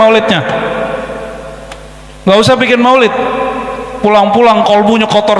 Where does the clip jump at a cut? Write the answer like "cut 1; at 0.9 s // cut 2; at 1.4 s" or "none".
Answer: none